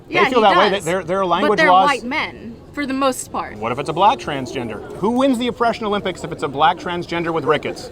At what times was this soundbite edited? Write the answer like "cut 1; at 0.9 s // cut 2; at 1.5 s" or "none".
cut 1; at 4.9 s